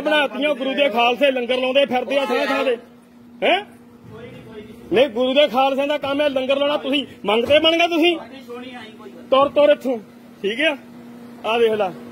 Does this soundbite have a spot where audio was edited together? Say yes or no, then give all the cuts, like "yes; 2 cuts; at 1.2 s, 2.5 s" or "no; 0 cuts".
no; 0 cuts